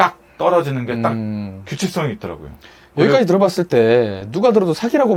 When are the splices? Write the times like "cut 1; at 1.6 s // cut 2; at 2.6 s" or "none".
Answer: none